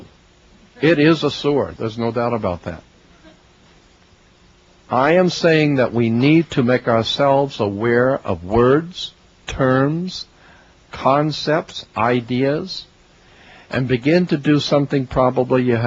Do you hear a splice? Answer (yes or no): yes